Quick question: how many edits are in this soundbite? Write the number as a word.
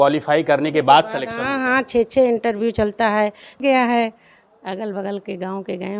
one